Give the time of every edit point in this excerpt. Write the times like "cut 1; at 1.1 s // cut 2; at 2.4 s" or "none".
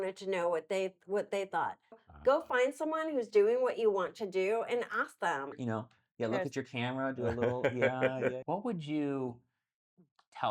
cut 1; at 2.1 s // cut 2; at 5.5 s // cut 3; at 8.4 s